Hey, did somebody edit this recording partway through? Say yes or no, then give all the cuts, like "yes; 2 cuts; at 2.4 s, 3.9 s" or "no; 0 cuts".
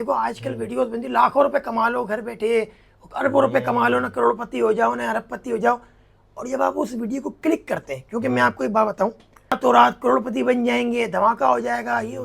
yes; 1 cut; at 9.6 s